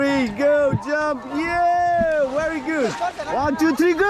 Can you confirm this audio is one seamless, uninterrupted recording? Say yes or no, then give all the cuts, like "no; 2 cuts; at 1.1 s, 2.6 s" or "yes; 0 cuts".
yes; 0 cuts